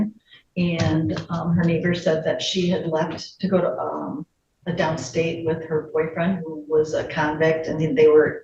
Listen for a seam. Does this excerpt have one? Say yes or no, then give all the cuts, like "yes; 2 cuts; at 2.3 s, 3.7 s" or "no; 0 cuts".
no; 0 cuts